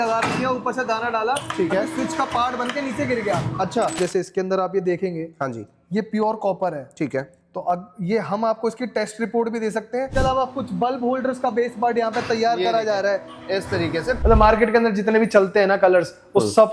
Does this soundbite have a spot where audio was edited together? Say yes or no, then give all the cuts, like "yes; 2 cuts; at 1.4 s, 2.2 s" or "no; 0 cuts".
yes; 3 cuts; at 4.0 s, 10.1 s, 14.2 s